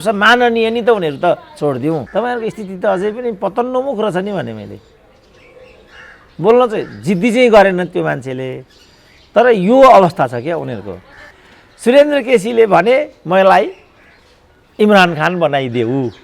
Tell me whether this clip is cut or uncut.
cut